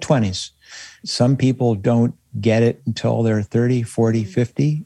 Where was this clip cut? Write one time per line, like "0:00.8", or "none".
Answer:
0:01.0